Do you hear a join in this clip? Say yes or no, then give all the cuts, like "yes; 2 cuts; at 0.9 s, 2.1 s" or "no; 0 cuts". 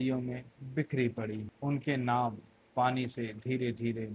yes; 1 cut; at 1.5 s